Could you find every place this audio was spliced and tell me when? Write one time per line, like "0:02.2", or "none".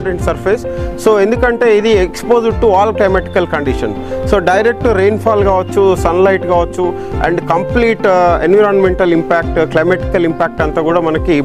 none